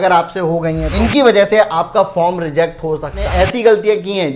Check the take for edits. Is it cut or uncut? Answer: cut